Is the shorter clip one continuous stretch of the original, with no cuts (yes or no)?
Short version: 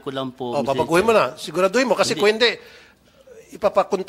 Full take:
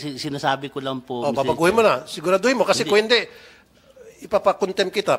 yes